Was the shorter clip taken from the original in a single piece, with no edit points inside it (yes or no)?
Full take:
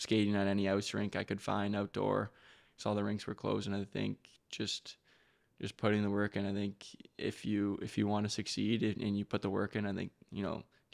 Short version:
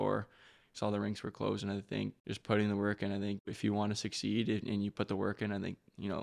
no